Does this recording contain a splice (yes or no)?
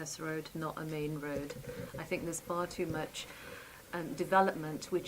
no